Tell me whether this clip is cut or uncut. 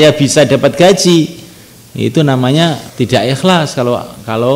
cut